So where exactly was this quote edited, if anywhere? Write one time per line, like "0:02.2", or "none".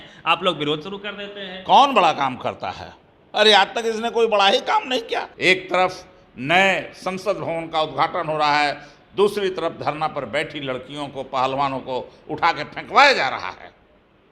0:05.3